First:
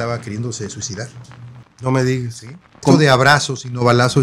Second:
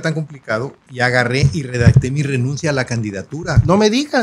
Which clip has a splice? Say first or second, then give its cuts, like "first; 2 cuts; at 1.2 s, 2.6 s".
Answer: first; 1 cut; at 2.8 s